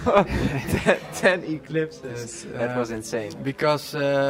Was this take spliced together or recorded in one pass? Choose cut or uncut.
uncut